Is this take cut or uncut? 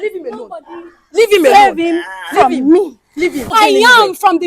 cut